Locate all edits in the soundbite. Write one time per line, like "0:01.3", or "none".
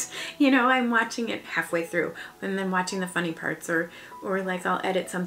none